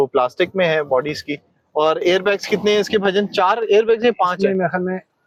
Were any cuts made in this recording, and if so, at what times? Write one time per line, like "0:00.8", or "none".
none